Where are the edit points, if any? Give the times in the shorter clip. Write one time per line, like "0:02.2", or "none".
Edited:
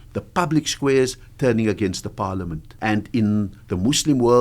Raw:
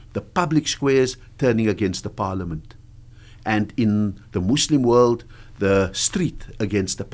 0:02.6